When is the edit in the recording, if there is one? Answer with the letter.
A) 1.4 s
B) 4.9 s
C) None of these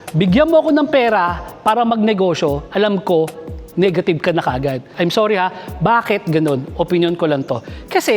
B